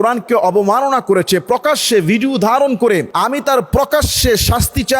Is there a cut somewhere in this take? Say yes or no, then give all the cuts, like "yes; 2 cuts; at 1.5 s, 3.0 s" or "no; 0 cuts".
yes; 1 cut; at 3.1 s